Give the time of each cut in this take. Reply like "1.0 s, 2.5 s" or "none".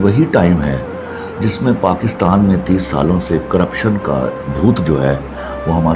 none